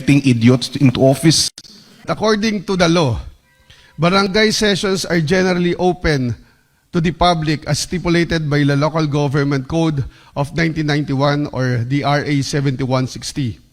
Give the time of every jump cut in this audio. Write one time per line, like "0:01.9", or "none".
0:02.1